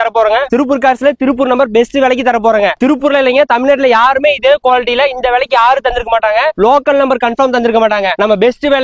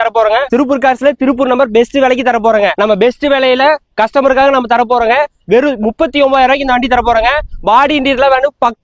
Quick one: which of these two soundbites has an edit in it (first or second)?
second